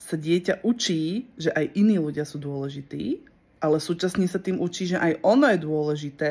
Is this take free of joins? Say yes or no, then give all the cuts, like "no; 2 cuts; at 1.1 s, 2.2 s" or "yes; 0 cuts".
yes; 0 cuts